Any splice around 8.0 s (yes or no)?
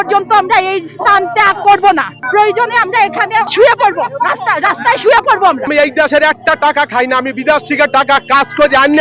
no